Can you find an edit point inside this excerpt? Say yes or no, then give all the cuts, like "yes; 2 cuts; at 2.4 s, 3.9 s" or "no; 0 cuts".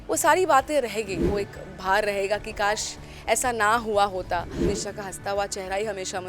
yes; 2 cuts; at 1.3 s, 4.6 s